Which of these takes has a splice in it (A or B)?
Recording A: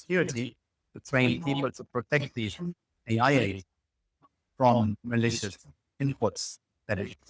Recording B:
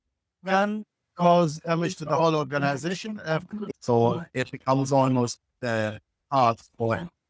B